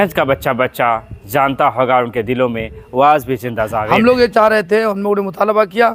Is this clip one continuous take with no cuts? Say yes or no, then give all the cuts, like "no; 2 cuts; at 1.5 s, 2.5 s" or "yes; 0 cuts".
no; 1 cut; at 3.9 s